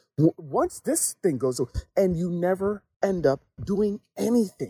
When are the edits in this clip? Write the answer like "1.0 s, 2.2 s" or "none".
2.9 s